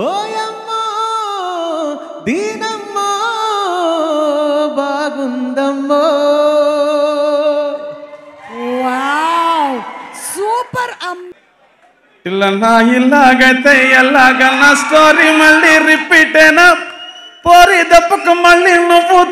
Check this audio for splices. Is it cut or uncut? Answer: cut